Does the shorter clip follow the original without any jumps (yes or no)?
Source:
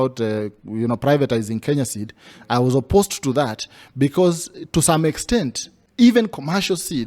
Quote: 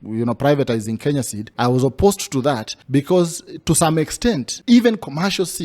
no